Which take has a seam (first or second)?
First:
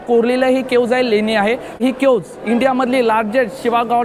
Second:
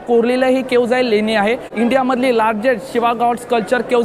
second